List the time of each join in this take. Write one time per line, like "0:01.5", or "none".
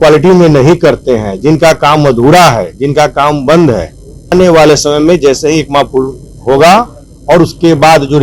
0:04.3

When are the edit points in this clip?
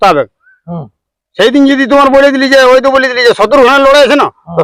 none

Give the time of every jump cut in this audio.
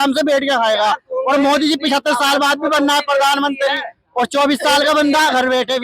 none

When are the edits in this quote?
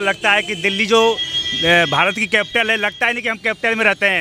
none

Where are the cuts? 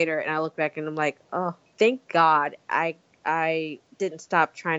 0:01.6
0:03.8

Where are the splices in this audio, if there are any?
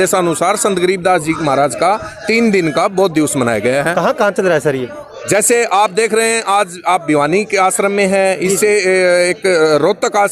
none

